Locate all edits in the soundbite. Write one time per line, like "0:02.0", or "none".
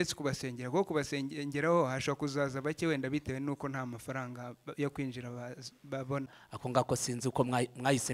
0:06.3

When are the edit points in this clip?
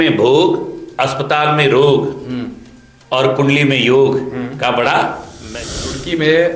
0:05.5

